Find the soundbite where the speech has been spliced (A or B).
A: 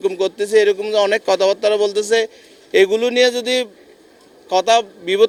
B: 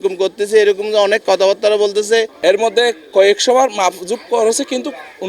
B